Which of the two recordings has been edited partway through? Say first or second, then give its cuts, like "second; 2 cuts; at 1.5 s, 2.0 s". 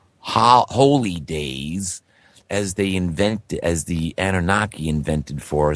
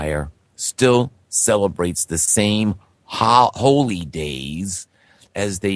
second; 1 cut; at 1.7 s